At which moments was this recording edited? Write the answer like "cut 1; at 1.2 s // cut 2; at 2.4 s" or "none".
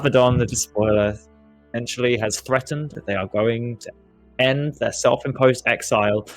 cut 1; at 3.0 s

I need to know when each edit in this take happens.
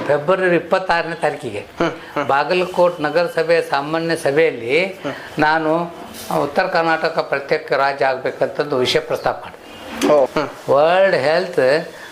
cut 1; at 10.3 s

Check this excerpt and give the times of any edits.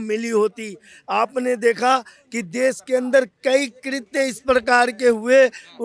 none

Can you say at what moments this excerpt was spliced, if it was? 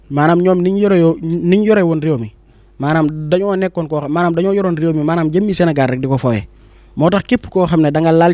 none

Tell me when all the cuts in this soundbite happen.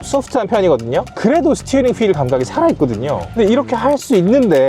cut 1; at 1.1 s // cut 2; at 3.2 s

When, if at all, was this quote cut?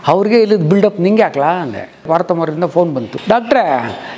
cut 1; at 2.1 s // cut 2; at 3.1 s

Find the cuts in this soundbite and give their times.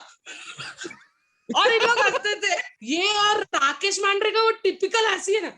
cut 1; at 2.7 s

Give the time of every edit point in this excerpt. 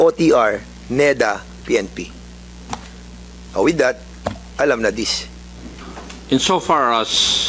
cut 1; at 5.8 s

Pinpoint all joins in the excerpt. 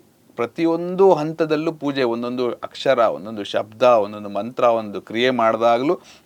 none

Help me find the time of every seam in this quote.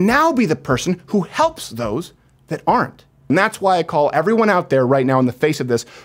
cut 1; at 3.2 s

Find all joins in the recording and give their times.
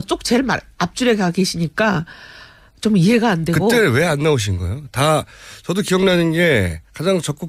none

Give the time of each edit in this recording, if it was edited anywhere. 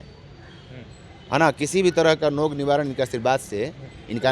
none

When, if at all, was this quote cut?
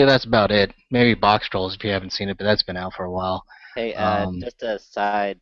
cut 1; at 3.0 s

